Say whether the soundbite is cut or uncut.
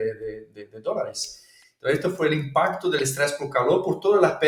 uncut